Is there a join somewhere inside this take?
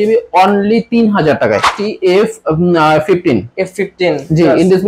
yes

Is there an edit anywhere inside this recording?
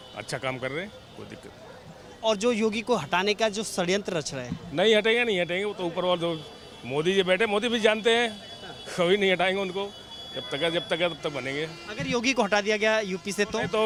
no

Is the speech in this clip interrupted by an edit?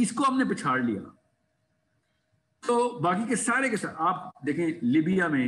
no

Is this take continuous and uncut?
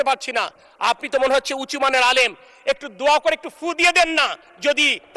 yes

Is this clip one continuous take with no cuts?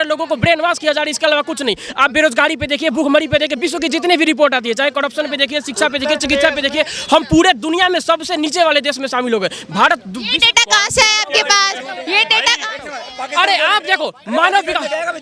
yes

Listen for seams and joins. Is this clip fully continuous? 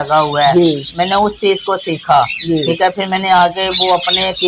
yes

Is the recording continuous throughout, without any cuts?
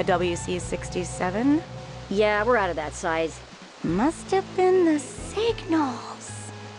no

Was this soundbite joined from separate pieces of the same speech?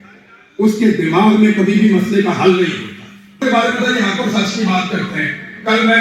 yes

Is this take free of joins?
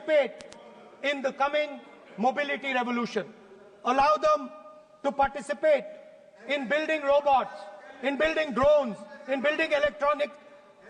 yes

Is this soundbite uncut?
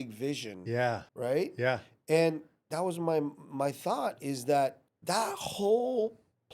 no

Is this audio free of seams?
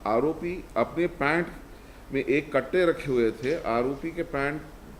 yes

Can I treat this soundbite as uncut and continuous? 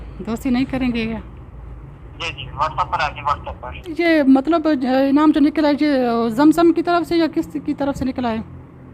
no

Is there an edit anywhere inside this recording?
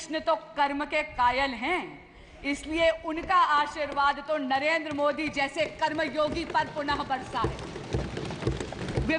no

